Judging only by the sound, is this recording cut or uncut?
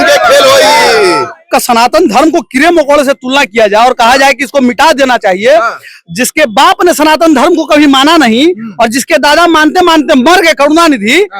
cut